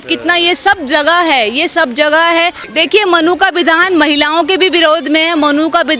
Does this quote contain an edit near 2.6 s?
yes; 1 cut; at 2.6 s

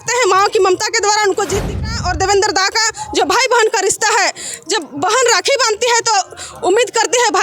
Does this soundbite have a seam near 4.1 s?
no; 1 cut; at 1.9 s

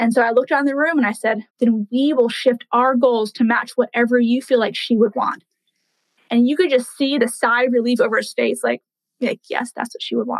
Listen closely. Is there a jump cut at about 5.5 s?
no; 1 cut; at 1.4 s

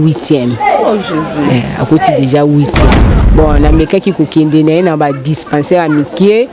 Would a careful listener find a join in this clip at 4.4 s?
no; 1 cut; at 3.2 s

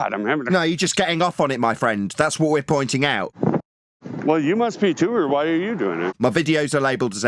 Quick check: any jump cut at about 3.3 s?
yes; 2 cuts; at 3.3 s, 6.1 s

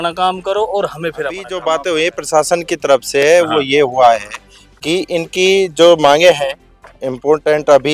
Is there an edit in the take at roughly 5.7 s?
no; 1 cut; at 1.5 s

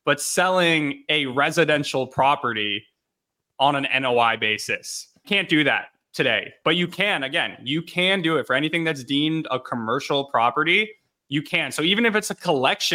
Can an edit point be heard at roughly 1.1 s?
no; 1 cut; at 5.2 s

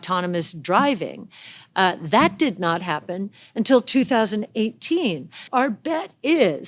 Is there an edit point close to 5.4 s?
yes; 1 cut; at 5.4 s

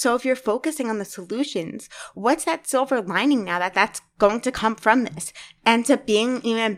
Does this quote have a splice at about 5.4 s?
yes; 1 cut; at 5.4 s

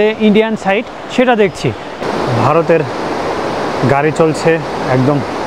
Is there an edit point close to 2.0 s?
yes; 1 cut; at 2.0 s

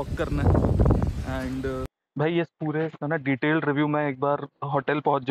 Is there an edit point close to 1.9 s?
yes; 1 cut; at 1.9 s

